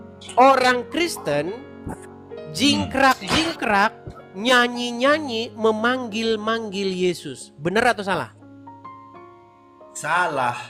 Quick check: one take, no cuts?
yes; 0 cuts

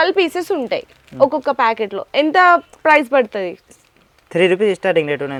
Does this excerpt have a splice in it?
no; 0 cuts

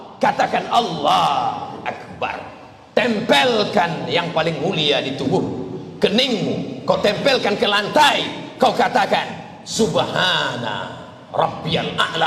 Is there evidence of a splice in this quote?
no; 0 cuts

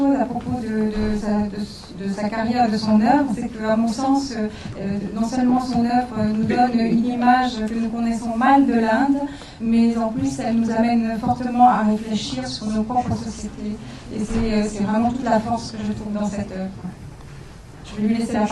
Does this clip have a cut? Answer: yes; 1 cut; at 12.9 s

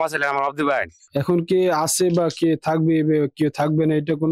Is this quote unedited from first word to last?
no; 1 cut; at 1.0 s

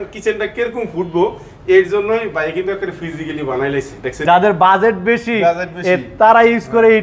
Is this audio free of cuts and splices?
no; 1 cut; at 4.2 s

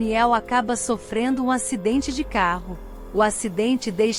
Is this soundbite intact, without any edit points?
yes; 0 cuts

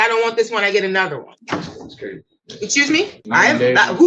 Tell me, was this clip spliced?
yes; 2 cuts; at 1.3 s, 3.2 s

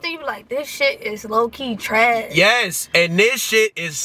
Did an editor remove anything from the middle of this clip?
no; 0 cuts

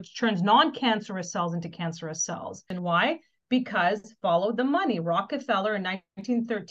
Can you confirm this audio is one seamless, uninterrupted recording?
no; 1 cut; at 2.7 s

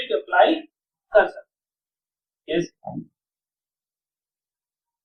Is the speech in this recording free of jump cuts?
yes; 0 cuts

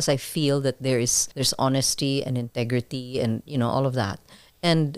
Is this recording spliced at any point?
yes; 1 cut; at 1.2 s

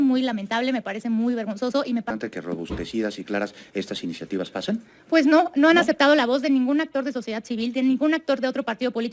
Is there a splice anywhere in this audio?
yes; 1 cut; at 2.1 s

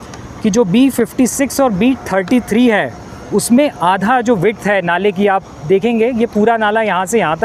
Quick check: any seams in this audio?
no; 0 cuts

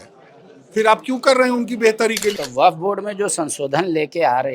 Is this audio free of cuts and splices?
no; 1 cut; at 2.3 s

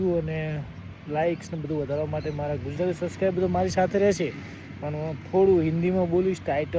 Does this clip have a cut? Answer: no; 0 cuts

